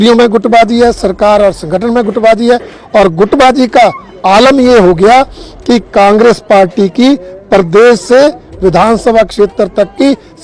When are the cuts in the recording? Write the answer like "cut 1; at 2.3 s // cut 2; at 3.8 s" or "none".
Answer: none